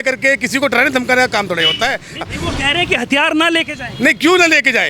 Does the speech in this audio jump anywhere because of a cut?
yes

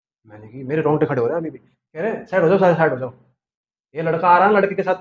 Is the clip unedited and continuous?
yes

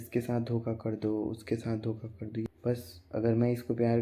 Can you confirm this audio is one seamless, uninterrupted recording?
no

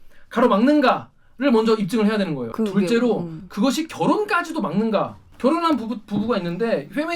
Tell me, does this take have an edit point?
yes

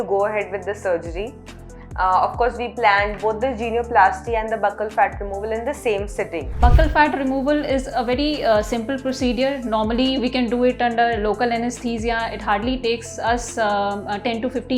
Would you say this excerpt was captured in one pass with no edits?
no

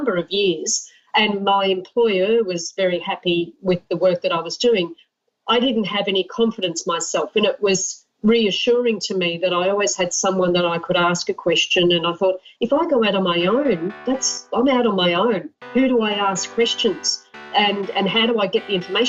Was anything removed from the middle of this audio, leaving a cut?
no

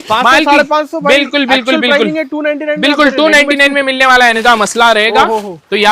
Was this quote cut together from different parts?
yes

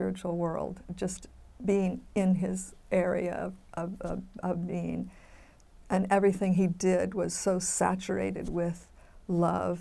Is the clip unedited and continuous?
yes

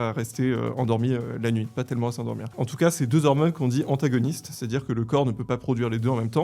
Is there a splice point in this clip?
yes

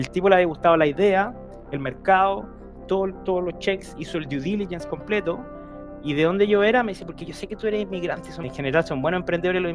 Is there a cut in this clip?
yes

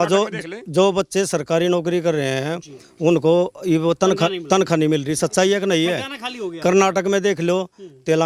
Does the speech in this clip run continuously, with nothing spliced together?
yes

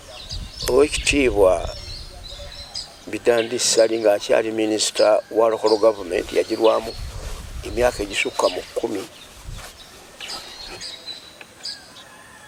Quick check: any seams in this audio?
no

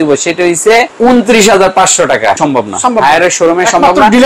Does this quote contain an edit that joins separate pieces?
yes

